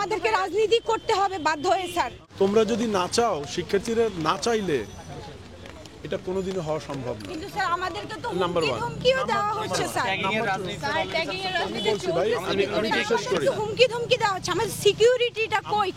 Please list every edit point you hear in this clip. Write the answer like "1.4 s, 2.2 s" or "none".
2.2 s